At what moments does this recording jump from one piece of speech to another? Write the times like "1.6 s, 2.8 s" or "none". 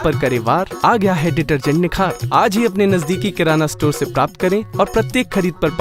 none